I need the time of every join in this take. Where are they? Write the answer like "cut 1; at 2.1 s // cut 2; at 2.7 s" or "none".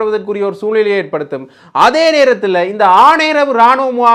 none